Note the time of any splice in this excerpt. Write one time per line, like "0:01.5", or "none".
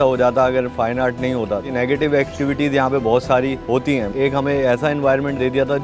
0:04.1